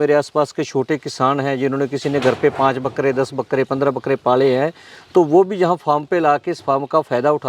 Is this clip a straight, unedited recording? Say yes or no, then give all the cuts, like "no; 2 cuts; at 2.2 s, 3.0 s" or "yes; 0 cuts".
yes; 0 cuts